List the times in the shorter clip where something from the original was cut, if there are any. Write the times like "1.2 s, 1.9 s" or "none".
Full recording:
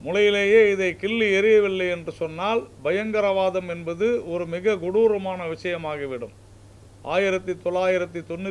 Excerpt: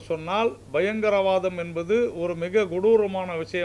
none